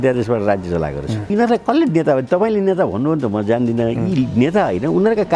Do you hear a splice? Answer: yes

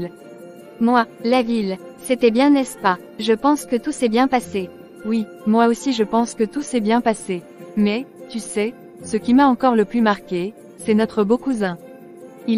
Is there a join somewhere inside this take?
no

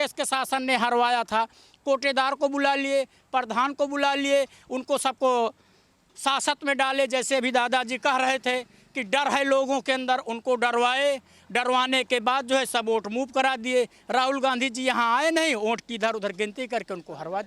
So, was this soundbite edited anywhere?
no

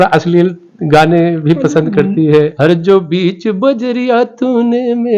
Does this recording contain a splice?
yes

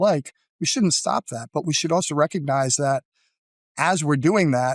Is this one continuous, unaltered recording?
yes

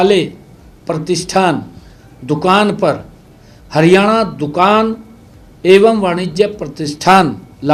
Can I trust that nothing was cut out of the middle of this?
yes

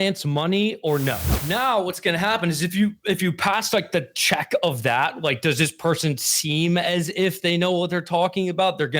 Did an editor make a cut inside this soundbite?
yes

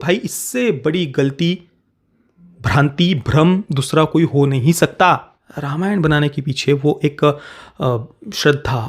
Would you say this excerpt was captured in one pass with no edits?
yes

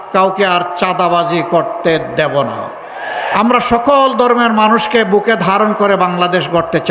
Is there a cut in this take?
yes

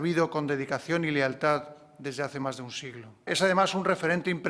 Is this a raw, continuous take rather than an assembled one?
no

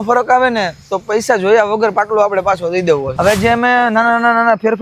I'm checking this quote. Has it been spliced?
yes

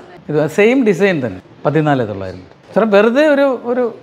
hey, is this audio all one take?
no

